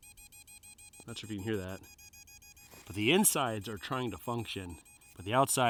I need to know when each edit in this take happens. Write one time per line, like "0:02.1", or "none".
none